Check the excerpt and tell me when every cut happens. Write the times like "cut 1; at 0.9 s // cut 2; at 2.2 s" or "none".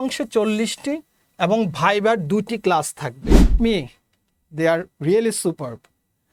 cut 1; at 3.5 s